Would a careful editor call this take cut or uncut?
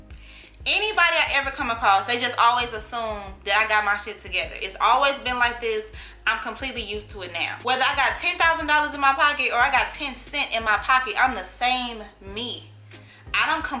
cut